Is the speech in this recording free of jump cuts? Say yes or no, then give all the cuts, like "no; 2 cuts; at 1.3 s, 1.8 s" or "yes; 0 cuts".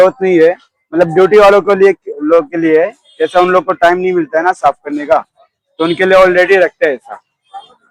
yes; 0 cuts